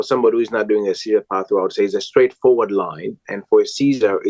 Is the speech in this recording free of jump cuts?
yes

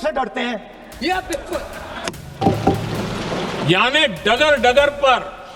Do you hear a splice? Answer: yes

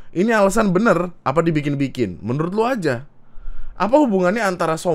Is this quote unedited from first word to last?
yes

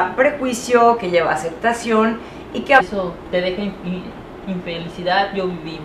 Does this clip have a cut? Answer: no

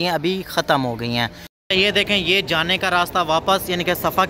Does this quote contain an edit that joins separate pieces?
yes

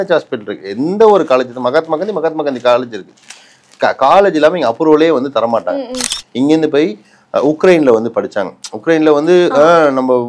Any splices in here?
yes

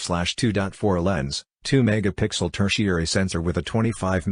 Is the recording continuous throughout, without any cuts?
no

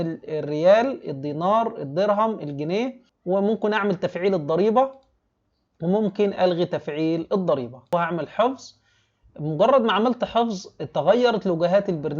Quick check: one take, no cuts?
no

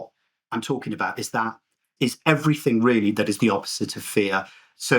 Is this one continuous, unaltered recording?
no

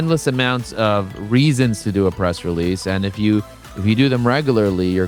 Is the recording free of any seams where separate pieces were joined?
yes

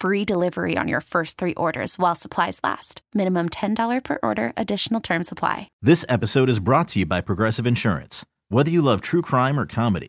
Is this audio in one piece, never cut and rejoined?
no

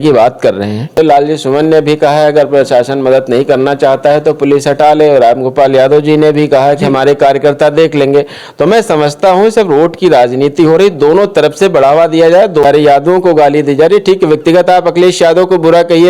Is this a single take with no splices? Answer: no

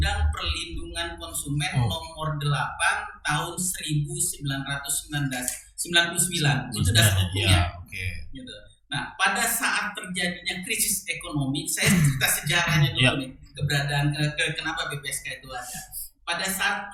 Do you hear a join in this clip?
no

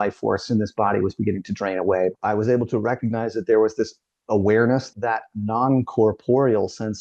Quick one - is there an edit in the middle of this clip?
yes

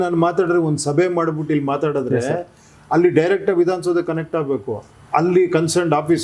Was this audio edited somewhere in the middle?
no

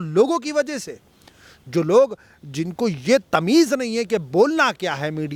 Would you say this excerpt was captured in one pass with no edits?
yes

